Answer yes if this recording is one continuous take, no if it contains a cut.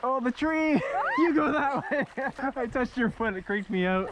no